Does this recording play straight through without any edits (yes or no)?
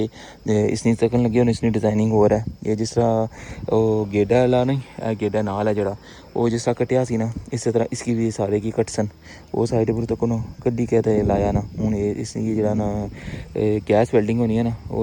yes